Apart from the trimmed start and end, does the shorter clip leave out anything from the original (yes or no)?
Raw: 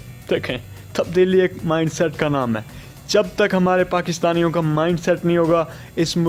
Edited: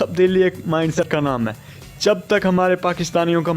yes